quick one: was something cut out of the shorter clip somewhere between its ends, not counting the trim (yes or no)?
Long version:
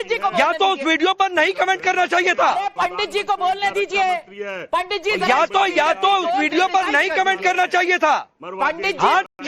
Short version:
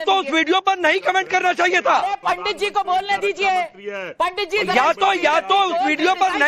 no